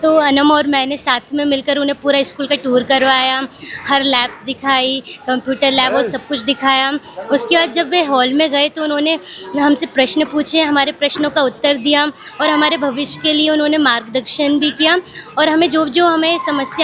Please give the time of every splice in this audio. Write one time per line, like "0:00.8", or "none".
none